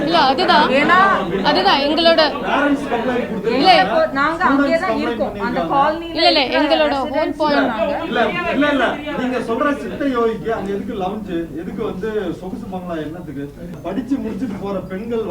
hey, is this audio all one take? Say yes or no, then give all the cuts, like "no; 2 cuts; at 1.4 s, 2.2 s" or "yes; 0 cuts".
no; 1 cut; at 13.8 s